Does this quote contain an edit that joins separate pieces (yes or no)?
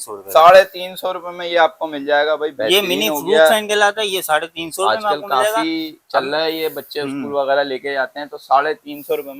no